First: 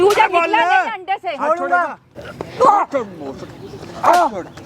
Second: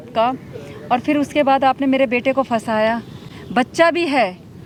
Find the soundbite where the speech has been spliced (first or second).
first